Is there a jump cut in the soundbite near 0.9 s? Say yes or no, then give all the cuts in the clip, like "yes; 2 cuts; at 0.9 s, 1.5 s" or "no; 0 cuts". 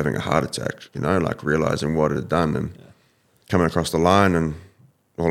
yes; 1 cut; at 0.9 s